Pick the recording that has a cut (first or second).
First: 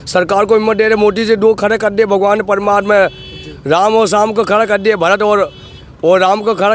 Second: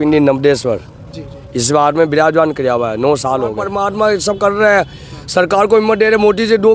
second